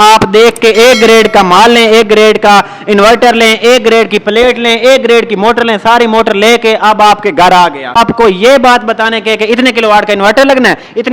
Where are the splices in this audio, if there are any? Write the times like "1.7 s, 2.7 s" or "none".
7.9 s